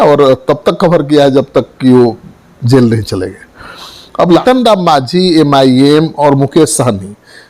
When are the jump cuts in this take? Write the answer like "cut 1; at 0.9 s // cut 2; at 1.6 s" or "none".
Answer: cut 1; at 4.4 s